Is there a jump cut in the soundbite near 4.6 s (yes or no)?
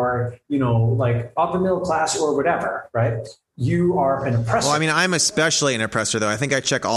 yes